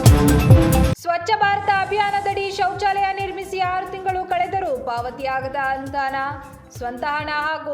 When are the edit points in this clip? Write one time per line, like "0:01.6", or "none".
0:00.9

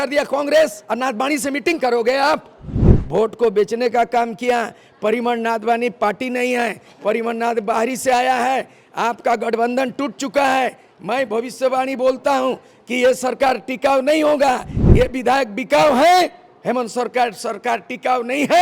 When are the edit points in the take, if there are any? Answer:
0:02.9

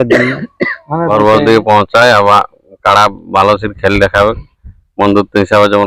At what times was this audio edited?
0:01.1

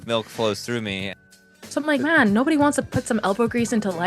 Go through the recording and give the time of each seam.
0:01.3

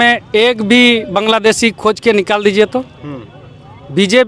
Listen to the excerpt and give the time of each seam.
none

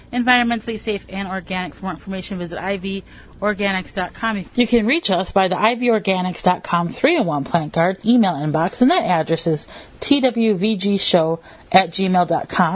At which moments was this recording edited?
0:04.4

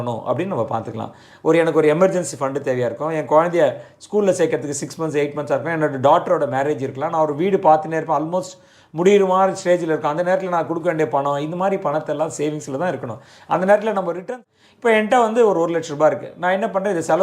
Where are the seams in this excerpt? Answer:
0:14.3

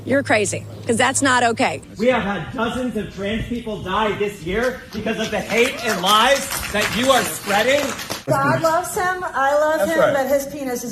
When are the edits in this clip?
0:01.8
0:08.2

